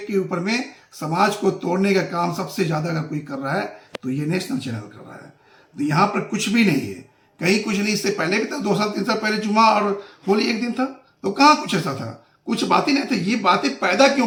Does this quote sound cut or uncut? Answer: uncut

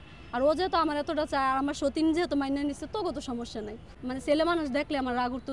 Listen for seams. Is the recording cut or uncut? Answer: cut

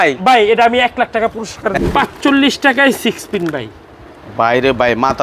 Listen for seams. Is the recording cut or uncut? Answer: cut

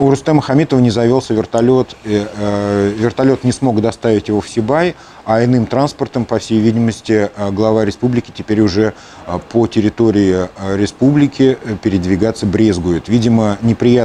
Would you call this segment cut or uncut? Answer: uncut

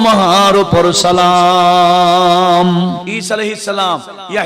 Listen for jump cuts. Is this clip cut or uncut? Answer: cut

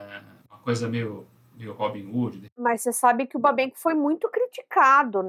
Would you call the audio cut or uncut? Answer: cut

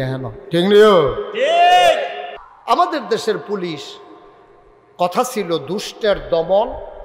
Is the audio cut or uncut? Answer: cut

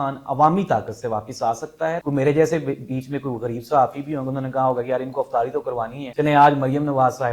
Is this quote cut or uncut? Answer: cut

